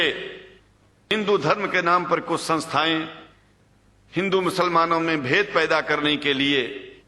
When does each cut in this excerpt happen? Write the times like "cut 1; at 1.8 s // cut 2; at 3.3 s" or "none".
cut 1; at 1.1 s